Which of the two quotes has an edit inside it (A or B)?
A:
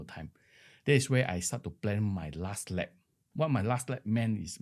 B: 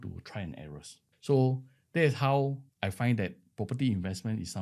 B